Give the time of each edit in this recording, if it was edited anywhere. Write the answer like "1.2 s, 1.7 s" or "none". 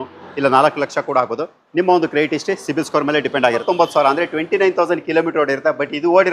3.6 s